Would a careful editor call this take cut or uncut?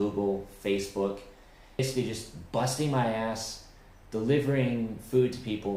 cut